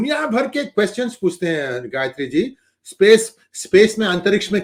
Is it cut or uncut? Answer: uncut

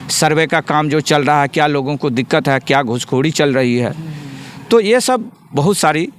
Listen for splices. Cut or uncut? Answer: uncut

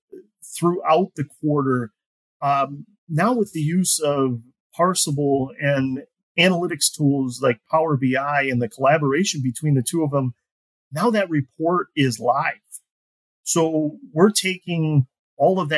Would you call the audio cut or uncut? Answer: uncut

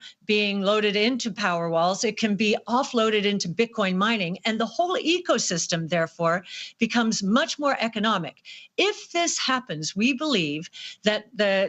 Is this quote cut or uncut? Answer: uncut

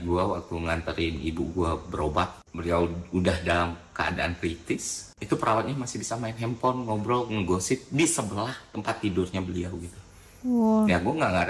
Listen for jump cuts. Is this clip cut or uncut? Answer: uncut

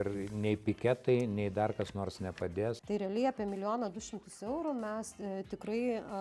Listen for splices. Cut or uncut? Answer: cut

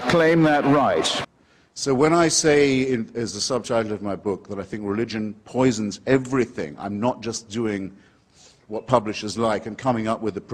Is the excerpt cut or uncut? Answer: uncut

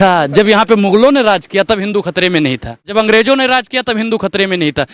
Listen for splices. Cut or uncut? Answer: cut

